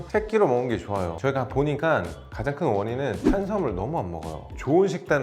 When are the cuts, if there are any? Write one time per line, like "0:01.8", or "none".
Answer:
0:01.1
0:04.4

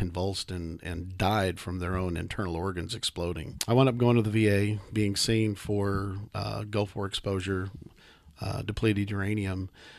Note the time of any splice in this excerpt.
0:03.5

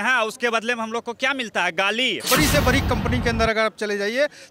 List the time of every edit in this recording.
0:02.3

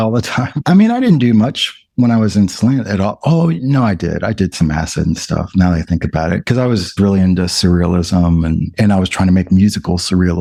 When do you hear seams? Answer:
none

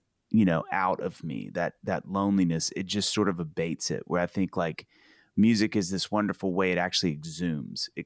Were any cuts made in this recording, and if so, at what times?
none

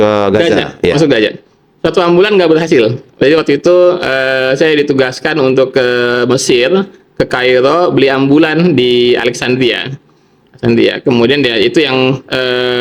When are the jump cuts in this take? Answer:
none

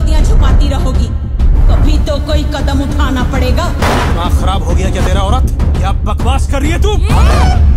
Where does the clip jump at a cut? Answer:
none

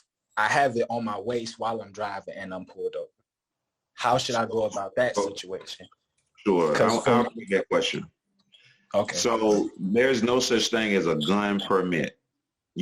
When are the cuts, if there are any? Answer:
none

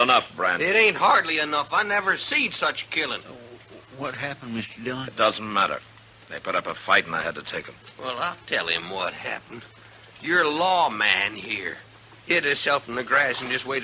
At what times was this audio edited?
none

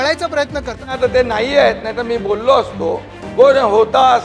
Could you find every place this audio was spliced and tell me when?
0:00.9

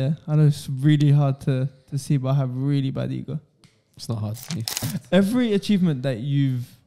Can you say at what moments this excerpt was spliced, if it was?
0:04.9

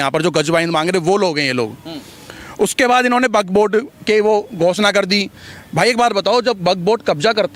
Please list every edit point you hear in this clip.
none

